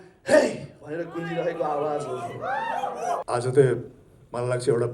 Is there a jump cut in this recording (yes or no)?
yes